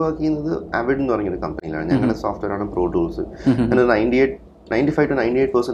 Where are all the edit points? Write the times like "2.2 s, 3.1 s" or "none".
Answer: none